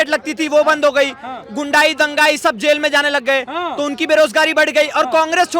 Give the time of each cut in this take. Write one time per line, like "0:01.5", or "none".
none